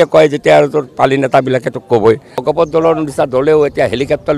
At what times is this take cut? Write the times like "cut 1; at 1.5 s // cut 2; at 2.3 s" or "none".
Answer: cut 1; at 2.4 s